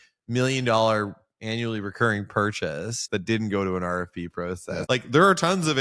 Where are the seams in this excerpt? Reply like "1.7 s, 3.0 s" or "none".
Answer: 3.0 s, 4.8 s